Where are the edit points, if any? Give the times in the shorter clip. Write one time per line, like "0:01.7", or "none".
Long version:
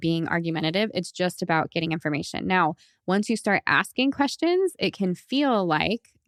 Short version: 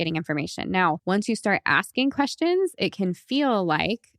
0:01.0